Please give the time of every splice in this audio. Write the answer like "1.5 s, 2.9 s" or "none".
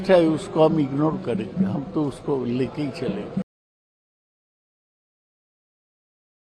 none

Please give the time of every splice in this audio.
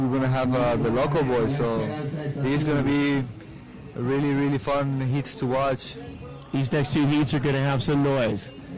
3.5 s

